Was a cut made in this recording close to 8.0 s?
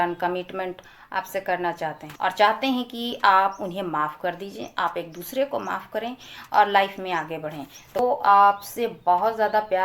yes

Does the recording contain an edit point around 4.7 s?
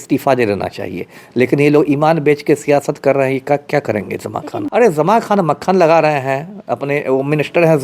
yes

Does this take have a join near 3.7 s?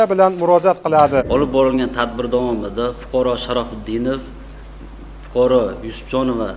no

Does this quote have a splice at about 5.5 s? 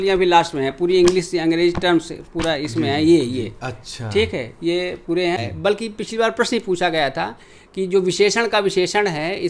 yes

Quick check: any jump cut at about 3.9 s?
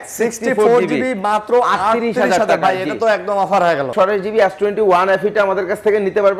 yes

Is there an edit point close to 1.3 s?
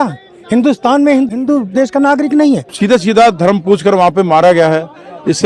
yes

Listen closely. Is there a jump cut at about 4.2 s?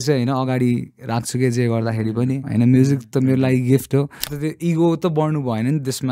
yes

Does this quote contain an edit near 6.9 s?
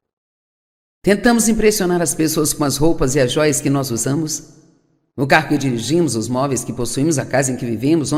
no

